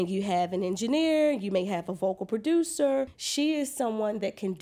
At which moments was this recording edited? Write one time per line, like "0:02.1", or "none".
0:03.2

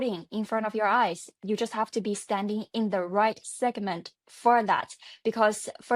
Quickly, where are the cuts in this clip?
0:01.4

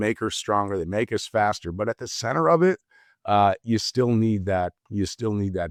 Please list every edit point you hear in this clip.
none

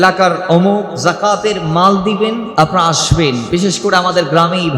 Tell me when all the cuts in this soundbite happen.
0:00.9
0:02.5
0:03.4

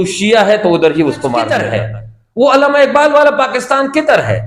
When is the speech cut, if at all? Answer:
0:01.6

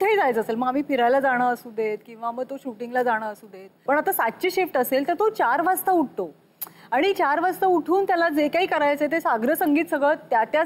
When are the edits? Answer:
0:03.8

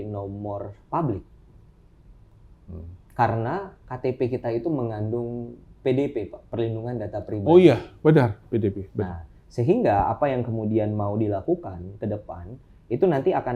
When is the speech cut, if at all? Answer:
none

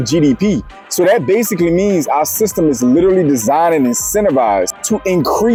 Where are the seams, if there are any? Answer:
none

